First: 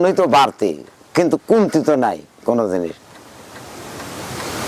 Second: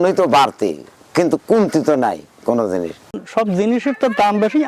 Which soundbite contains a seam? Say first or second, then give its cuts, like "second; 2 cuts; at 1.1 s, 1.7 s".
second; 1 cut; at 3.2 s